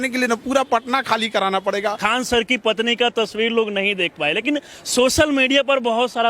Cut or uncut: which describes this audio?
cut